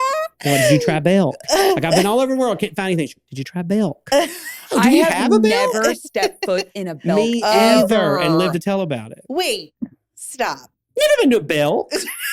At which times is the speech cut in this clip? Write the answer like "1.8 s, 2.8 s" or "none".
none